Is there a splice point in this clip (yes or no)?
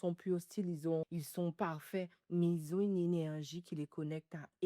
yes